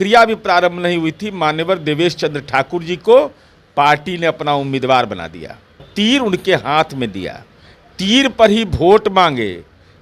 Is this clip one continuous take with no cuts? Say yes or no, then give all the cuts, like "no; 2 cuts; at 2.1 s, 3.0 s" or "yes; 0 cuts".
no; 1 cut; at 5.9 s